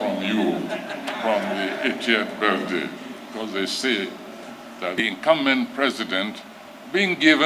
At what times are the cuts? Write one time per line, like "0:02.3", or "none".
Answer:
0:05.0